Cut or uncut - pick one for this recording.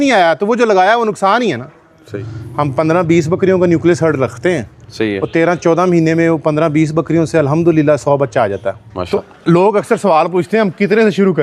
cut